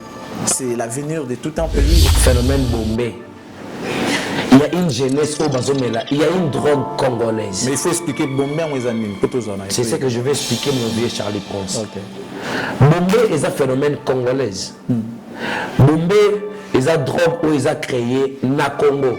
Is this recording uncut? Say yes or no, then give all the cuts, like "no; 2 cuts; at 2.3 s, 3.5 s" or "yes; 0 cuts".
no; 1 cut; at 2.1 s